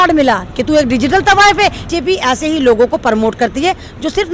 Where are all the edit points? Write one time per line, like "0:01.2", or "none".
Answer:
0:01.9